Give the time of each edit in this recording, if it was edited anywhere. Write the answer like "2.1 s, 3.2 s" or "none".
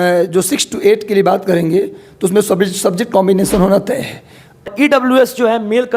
4.7 s